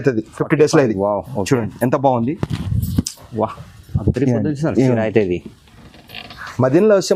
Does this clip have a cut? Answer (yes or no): no